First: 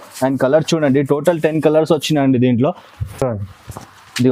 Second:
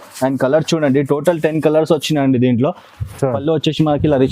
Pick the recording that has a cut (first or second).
second